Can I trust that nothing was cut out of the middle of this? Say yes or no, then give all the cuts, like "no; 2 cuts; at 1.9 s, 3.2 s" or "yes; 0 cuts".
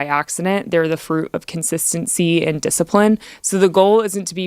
no; 1 cut; at 3.4 s